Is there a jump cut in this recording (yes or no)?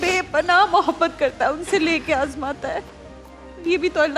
no